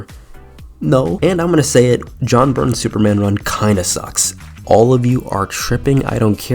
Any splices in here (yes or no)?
yes